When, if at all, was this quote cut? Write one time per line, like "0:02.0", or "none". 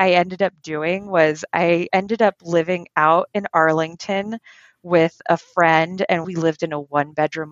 0:06.3